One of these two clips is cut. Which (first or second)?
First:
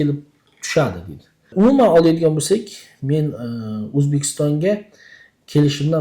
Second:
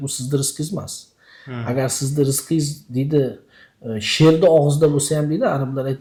first